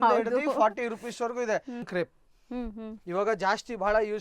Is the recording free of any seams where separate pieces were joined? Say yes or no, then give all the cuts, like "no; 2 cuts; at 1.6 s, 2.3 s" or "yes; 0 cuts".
no; 1 cut; at 1.9 s